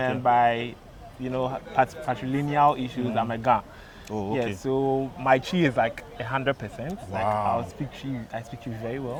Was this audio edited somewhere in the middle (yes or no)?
no